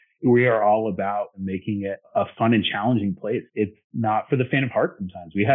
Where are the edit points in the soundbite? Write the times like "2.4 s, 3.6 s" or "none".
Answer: 1.3 s, 3.5 s